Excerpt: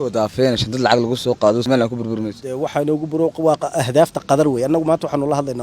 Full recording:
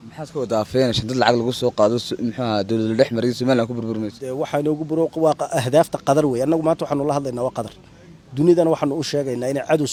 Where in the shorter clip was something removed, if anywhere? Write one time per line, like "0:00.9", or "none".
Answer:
0:01.7